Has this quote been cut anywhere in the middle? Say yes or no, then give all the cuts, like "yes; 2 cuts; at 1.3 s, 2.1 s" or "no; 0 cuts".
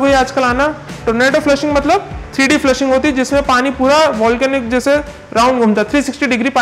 no; 0 cuts